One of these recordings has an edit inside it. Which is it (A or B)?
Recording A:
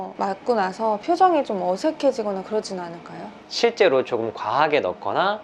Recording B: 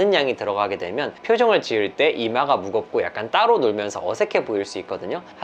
A